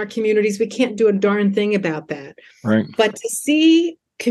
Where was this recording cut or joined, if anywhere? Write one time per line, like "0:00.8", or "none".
none